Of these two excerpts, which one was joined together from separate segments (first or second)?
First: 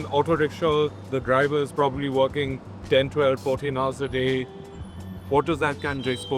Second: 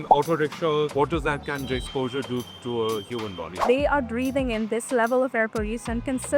second